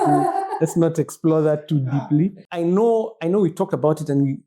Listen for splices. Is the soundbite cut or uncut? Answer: cut